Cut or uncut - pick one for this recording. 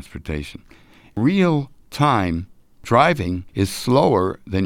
cut